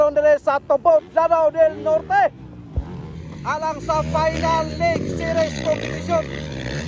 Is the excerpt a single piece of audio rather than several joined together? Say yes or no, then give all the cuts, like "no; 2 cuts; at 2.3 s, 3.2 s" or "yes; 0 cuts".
yes; 0 cuts